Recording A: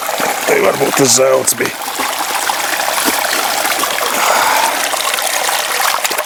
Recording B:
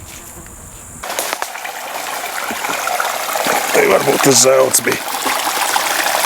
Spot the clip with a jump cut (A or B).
B